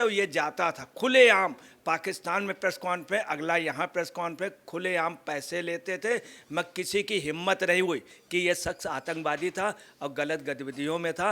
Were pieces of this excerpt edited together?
yes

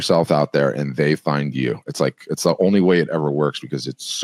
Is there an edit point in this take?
no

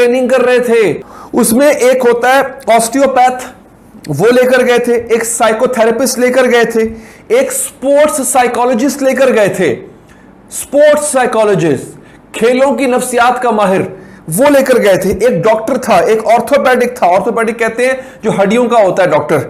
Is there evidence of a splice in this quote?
yes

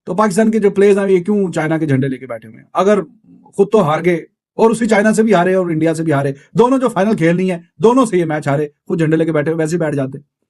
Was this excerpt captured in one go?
yes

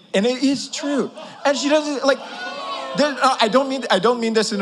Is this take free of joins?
yes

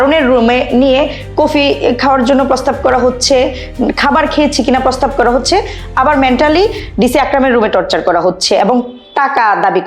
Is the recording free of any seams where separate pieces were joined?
yes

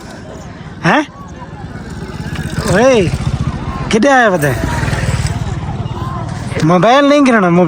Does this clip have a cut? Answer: no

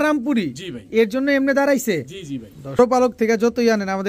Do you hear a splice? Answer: yes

